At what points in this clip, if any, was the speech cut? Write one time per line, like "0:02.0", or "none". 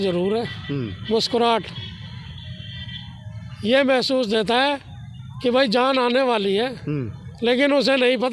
none